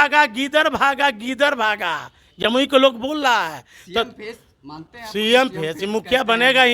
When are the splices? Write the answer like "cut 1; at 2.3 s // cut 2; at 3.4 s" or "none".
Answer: none